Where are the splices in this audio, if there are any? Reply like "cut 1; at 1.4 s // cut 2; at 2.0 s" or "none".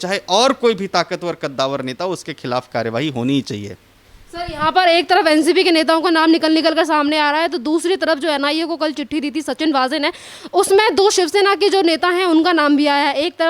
none